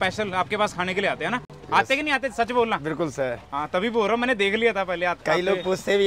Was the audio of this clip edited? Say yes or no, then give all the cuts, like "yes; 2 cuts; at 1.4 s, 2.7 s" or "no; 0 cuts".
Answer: no; 0 cuts